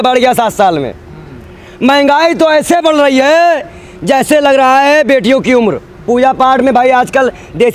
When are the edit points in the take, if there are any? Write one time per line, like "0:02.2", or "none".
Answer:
0:05.9